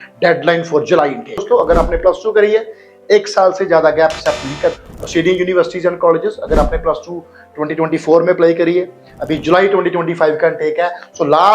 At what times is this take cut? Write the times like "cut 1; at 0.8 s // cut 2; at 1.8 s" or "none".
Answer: cut 1; at 1.4 s